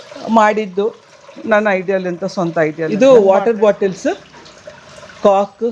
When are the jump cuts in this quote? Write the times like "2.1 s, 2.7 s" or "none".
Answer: 2.9 s